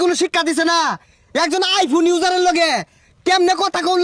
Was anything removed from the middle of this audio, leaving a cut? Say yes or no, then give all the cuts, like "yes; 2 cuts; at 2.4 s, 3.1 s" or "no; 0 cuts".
no; 0 cuts